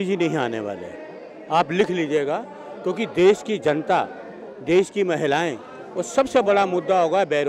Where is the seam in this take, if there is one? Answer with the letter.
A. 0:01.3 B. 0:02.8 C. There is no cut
C